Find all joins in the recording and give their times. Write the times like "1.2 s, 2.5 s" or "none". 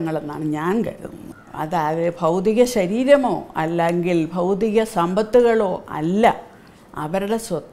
1.3 s